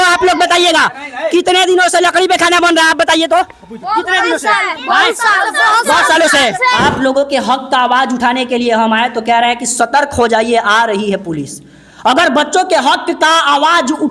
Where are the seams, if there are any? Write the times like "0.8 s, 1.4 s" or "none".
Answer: 6.8 s